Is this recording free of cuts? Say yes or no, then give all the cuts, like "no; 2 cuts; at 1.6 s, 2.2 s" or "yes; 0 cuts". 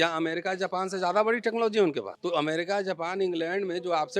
no; 1 cut; at 2.1 s